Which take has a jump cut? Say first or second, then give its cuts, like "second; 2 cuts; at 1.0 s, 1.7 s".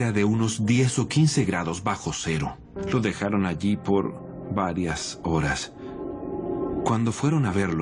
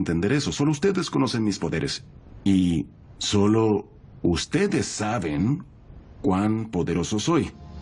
second; 1 cut; at 4.4 s